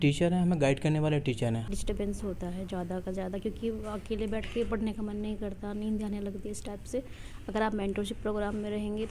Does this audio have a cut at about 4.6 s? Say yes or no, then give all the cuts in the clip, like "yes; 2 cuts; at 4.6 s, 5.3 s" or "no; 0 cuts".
no; 1 cut; at 1.7 s